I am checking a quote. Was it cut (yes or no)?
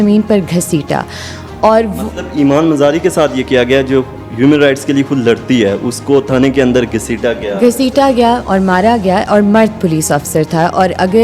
no